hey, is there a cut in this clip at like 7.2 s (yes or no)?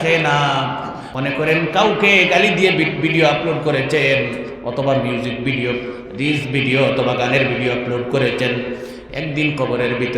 no